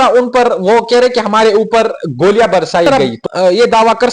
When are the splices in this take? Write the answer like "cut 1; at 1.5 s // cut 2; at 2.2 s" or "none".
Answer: cut 1; at 2.9 s

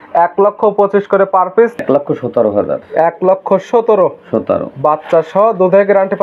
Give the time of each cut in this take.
cut 1; at 1.8 s

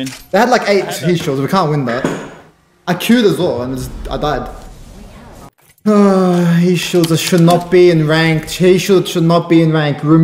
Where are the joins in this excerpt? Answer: cut 1; at 5.5 s

